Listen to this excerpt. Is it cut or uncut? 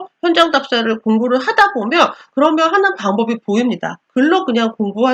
cut